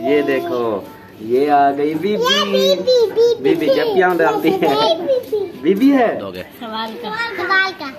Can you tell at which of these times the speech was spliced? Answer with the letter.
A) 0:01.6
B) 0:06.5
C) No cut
B